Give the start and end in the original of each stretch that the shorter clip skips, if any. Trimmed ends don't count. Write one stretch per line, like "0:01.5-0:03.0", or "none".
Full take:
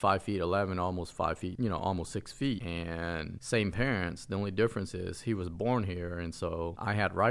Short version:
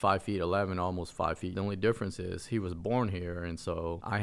0:01.5-0:04.2

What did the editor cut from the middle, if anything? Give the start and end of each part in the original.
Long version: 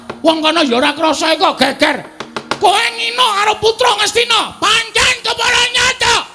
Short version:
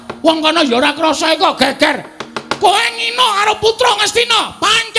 none

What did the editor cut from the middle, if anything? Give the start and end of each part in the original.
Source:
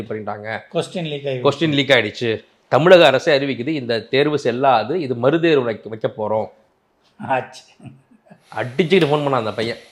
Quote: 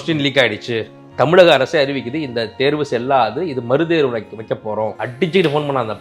0:06.6-0:08.6

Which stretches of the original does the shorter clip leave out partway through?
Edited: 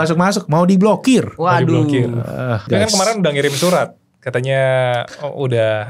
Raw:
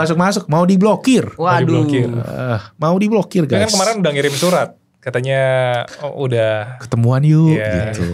0:02.7-0:03.5

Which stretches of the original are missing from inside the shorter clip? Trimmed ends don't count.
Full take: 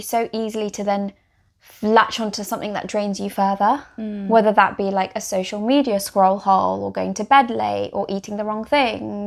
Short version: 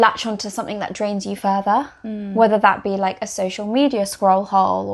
none

